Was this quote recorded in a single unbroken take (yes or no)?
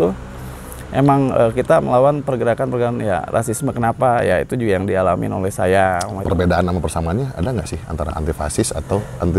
no